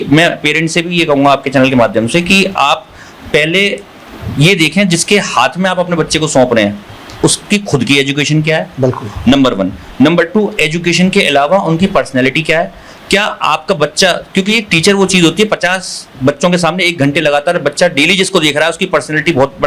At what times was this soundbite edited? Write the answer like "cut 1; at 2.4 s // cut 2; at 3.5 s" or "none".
none